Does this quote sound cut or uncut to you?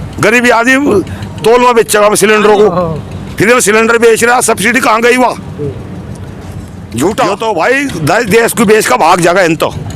cut